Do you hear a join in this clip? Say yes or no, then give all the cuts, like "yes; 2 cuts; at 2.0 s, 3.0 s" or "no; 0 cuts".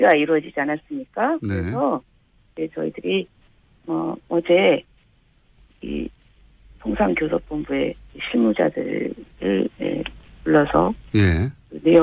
no; 0 cuts